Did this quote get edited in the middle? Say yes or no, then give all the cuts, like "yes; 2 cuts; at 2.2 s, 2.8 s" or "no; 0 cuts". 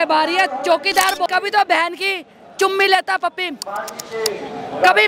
yes; 1 cut; at 1.3 s